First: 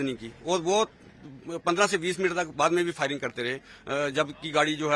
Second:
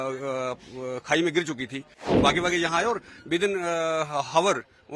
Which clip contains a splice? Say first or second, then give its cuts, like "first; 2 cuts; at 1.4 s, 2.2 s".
second; 1 cut; at 1.9 s